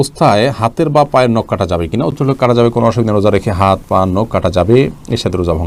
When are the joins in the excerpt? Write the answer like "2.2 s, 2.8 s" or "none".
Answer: none